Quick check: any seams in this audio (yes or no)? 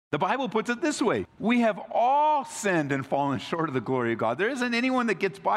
yes